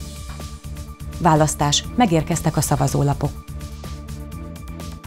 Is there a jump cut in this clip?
yes; 2 cuts; at 0.8 s, 3.7 s

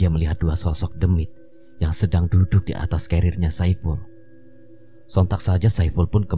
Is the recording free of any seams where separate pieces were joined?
yes; 0 cuts

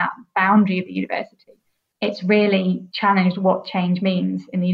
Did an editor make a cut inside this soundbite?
yes; 2 cuts; at 1.9 s, 2.9 s

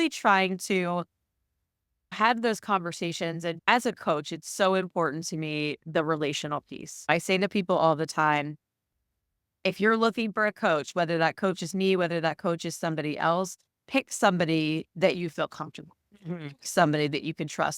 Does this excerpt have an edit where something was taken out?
no; 0 cuts

